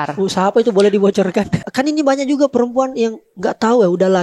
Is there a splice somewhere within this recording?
yes; 1 cut; at 1.3 s

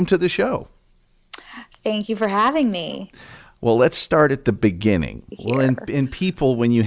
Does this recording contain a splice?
yes; 1 cut; at 5.3 s

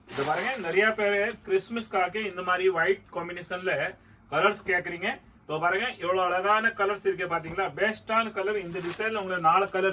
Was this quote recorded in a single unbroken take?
yes; 0 cuts

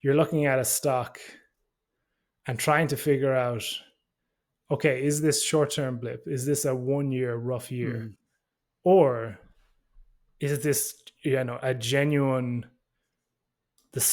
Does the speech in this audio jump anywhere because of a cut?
no; 0 cuts

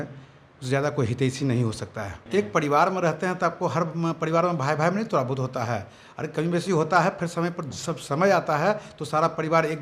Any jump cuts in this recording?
yes; 1 cut; at 2.2 s

